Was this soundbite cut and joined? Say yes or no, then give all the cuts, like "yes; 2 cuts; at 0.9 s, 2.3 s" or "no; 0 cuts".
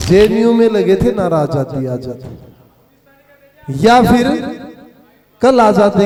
no; 0 cuts